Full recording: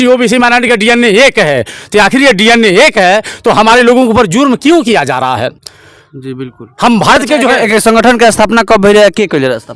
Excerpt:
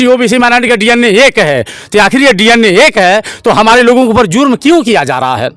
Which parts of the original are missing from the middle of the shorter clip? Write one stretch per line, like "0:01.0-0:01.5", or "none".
none